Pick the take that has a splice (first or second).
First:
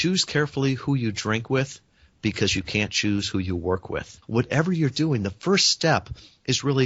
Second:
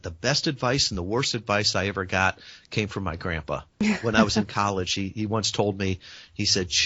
first